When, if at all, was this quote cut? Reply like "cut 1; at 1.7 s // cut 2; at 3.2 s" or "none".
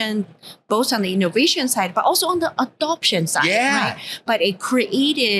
none